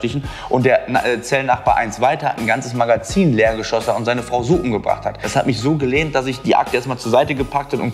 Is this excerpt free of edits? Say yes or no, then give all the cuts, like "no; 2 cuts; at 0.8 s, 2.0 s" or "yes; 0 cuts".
no; 1 cut; at 5.2 s